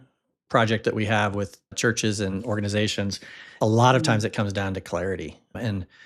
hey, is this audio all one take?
no; 2 cuts; at 1.7 s, 3.5 s

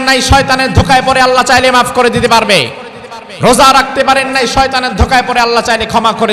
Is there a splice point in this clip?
no; 0 cuts

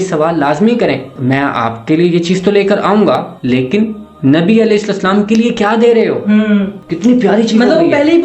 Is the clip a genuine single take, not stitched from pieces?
yes; 0 cuts

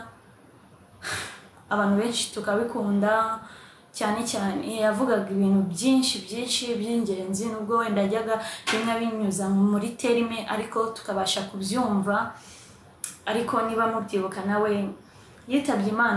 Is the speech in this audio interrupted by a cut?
no; 0 cuts

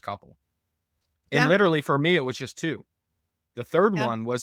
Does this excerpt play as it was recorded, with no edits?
yes; 0 cuts

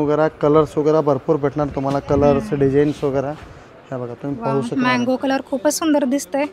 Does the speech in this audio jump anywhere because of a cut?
no; 0 cuts

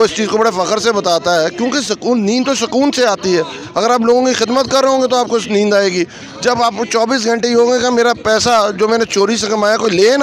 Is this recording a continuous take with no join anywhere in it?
yes; 0 cuts

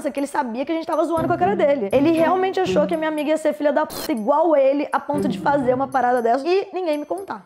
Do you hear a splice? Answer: yes; 2 cuts; at 1.8 s, 6.4 s

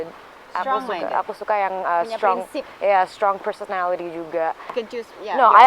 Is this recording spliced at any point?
yes; 1 cut; at 4.7 s

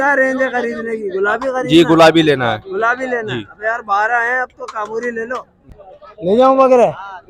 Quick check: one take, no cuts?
no; 1 cut; at 5.6 s

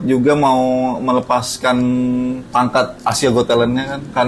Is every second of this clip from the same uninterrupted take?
no; 1 cut; at 2.4 s

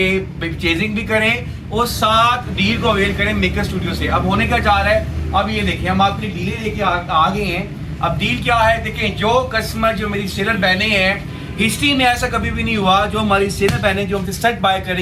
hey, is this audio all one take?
yes; 0 cuts

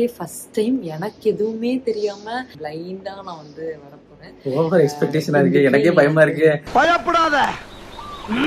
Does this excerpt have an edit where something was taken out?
yes; 1 cut; at 2.5 s

